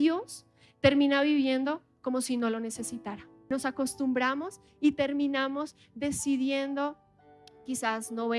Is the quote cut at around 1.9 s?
no; 1 cut; at 3.3 s

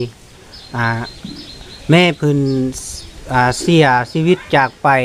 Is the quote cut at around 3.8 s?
no; 0 cuts

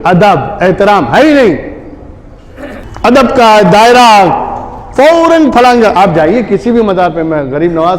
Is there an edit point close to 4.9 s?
no; 1 cut; at 2.9 s

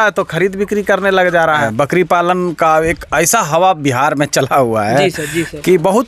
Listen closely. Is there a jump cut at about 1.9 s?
yes; 1 cut; at 1.9 s

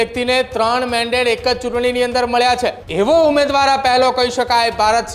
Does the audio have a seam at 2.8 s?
yes; 1 cut; at 2.8 s

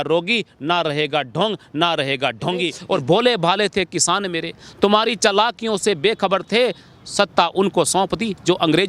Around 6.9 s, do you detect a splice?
no; 1 cut; at 2.8 s

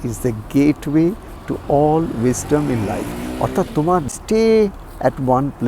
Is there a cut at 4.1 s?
yes; 1 cut; at 4.1 s

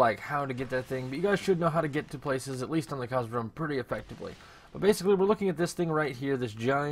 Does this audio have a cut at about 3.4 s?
no; 0 cuts

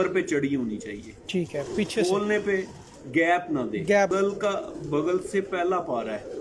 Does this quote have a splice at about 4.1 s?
yes; 1 cut; at 4.1 s

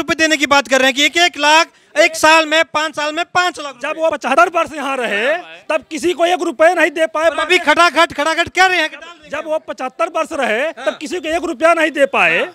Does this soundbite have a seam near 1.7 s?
no; 1 cut; at 4.3 s

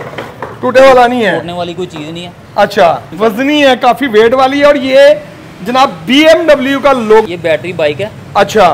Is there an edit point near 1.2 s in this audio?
no; 2 cuts; at 3.1 s, 7.2 s

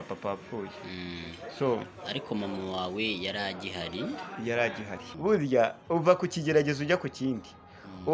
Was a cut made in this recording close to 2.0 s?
no; 1 cut; at 5.1 s

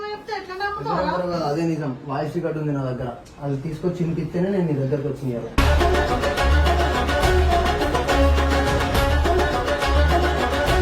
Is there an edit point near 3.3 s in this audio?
no; 0 cuts

